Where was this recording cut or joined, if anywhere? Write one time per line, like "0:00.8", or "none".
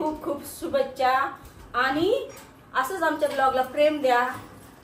none